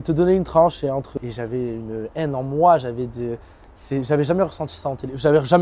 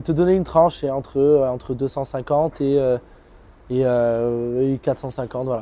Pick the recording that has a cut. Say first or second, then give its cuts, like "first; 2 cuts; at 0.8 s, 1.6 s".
first; 1 cut; at 1.1 s